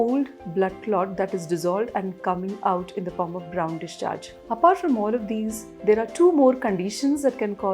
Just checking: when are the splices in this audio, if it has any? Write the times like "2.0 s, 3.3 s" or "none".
4.3 s